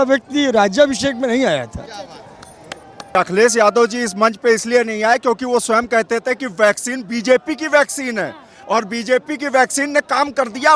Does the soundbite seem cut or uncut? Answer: cut